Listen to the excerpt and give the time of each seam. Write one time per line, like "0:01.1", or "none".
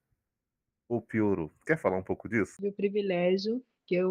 0:02.5